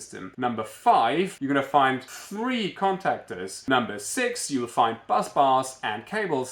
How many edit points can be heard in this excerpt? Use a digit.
3